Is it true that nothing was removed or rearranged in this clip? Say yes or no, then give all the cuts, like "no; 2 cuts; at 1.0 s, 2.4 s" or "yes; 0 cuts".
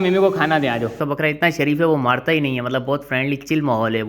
no; 1 cut; at 1.0 s